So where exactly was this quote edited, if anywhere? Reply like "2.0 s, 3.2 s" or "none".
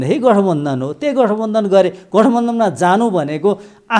none